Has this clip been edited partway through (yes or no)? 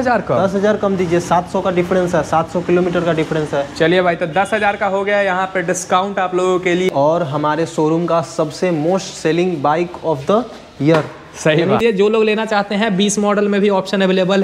yes